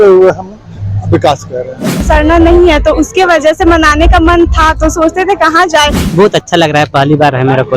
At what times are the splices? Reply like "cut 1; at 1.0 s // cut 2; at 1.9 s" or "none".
cut 1; at 2.0 s // cut 2; at 6.0 s